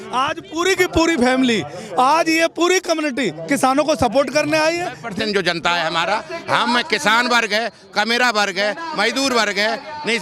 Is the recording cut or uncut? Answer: cut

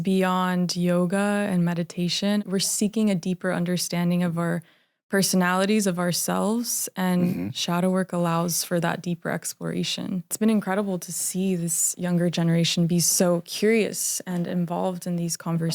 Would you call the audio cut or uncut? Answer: cut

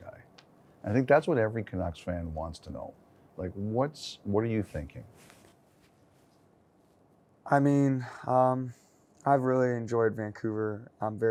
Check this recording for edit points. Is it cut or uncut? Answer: uncut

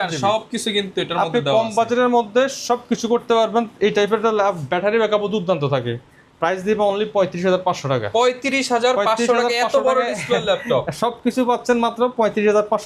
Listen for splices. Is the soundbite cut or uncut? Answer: uncut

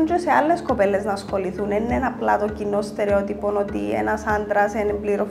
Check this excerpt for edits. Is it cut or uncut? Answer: uncut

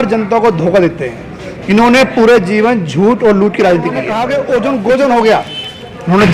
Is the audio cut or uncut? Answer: cut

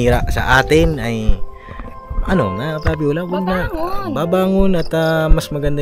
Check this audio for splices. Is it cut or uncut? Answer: uncut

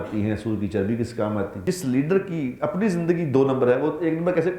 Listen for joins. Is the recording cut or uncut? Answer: cut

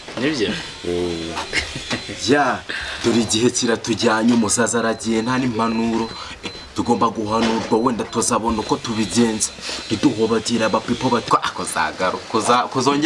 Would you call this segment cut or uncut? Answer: cut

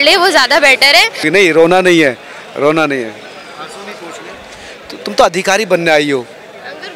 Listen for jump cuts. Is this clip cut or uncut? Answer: cut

